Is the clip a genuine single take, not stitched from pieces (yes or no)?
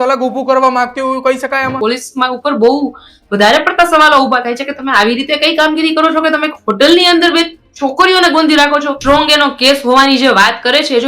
no